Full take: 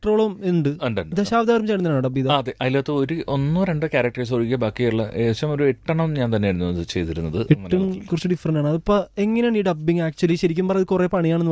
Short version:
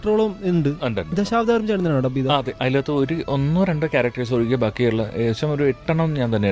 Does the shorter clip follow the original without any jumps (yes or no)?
yes